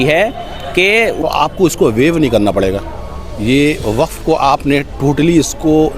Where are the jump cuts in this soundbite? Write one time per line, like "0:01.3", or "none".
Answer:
0:01.2